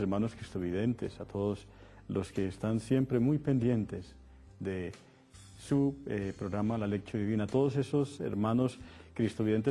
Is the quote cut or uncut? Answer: uncut